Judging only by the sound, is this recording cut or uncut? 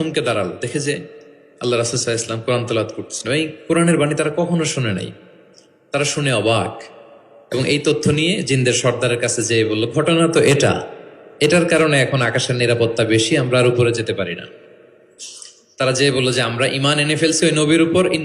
uncut